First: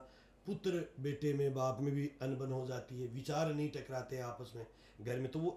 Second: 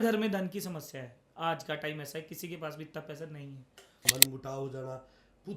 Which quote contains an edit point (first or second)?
second